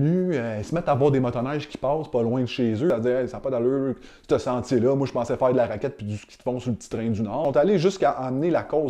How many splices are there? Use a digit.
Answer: 2